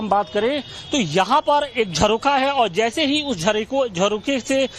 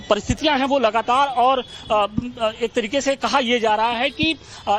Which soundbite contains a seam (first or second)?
first